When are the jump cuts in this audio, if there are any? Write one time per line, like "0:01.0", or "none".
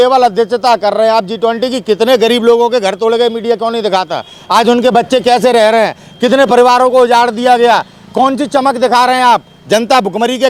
none